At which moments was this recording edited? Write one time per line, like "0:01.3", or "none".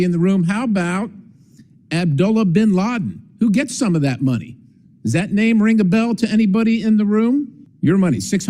0:07.6